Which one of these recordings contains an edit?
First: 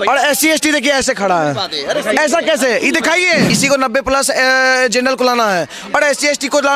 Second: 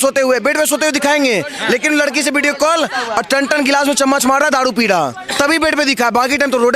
first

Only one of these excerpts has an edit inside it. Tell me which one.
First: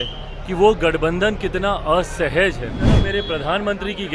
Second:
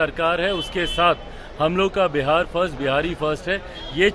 first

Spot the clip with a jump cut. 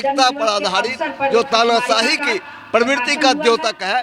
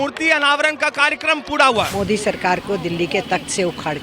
second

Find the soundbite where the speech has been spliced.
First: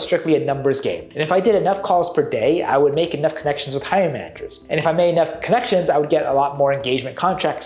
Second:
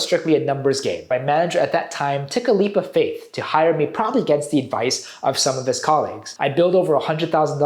second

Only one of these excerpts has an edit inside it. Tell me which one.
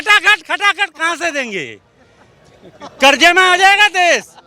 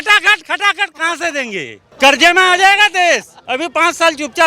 second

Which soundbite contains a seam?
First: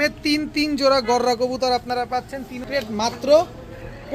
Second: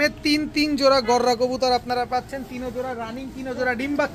first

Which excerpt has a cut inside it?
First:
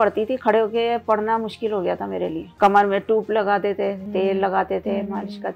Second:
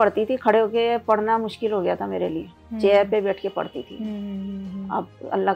first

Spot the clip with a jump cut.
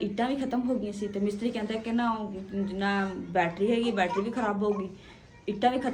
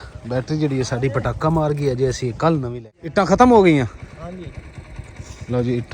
second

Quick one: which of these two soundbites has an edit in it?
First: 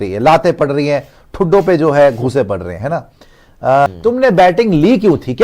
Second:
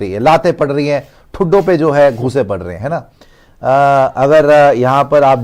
first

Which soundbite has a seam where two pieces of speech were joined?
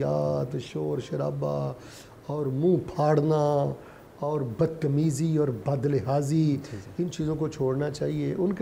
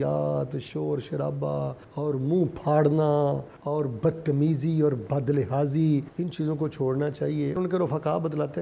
second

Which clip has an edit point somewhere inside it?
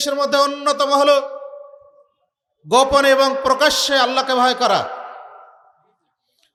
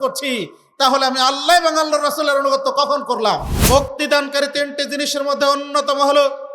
second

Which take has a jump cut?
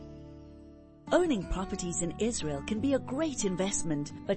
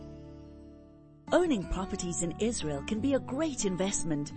first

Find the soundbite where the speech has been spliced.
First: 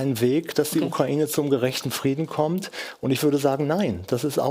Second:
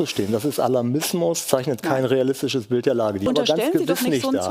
second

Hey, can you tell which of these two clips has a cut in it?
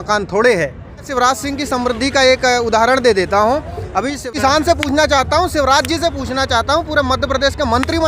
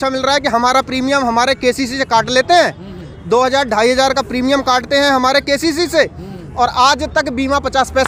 first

